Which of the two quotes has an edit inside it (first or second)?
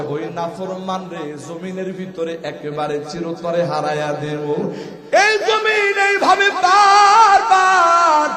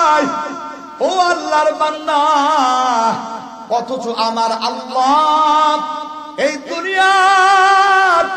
first